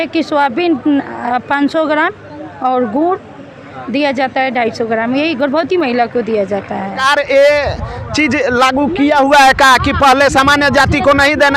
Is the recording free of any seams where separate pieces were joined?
no; 1 cut; at 7.0 s

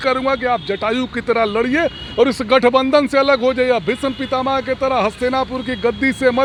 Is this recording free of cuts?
yes; 0 cuts

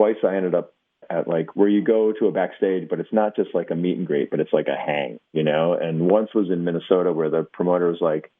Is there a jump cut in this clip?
yes; 1 cut; at 1.1 s

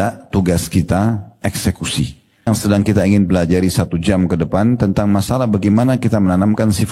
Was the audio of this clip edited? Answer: yes; 1 cut; at 2.5 s

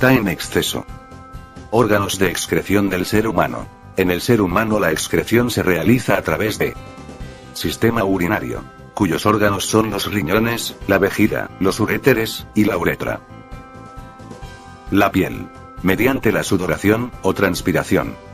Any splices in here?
no; 0 cuts

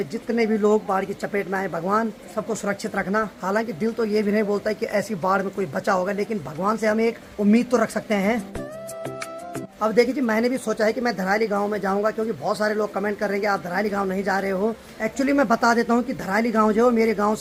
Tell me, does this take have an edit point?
no; 0 cuts

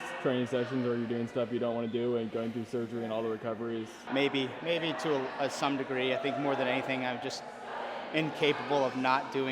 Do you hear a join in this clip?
yes; 1 cut; at 4.0 s

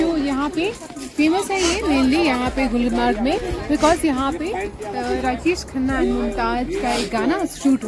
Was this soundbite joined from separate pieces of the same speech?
no; 0 cuts

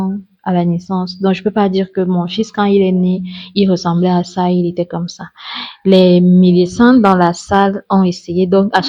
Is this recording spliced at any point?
no; 0 cuts

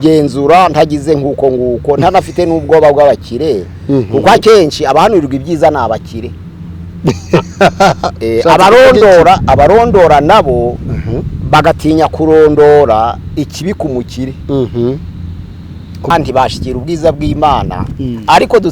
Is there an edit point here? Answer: yes; 1 cut; at 16.1 s

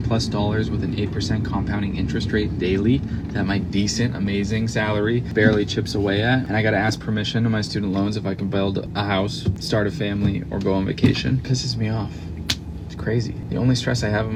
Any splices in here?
no; 0 cuts

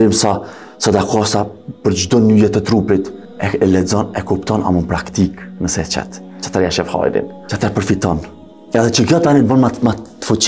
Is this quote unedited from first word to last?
yes; 0 cuts

